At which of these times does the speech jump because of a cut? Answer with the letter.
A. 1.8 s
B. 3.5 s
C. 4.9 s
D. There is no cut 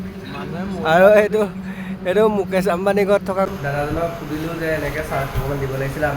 B